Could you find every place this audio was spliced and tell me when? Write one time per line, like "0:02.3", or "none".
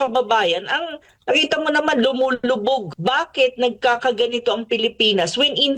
0:02.9